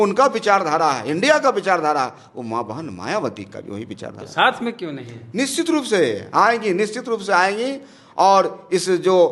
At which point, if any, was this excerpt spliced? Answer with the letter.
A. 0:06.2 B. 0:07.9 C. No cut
C